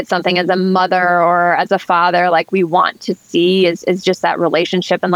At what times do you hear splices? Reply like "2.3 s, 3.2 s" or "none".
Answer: none